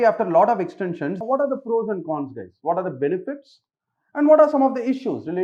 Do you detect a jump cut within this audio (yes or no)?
yes